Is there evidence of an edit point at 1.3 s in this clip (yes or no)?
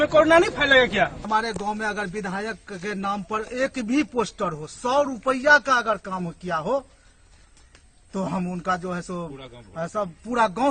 yes